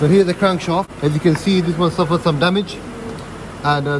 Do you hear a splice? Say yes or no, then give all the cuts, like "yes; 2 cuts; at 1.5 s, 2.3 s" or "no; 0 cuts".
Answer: yes; 1 cut; at 0.9 s